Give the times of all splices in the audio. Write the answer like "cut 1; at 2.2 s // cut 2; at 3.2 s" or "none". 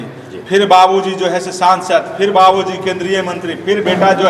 none